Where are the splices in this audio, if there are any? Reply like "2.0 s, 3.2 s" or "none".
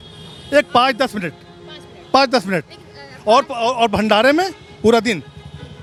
none